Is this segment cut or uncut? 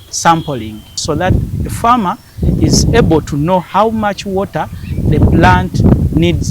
cut